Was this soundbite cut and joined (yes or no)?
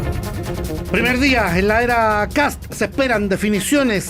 yes